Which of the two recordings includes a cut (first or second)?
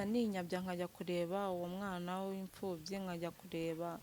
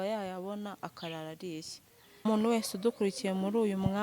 second